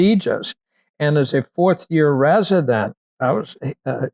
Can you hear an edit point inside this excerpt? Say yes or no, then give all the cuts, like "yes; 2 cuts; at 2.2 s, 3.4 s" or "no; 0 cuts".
yes; 1 cut; at 3.2 s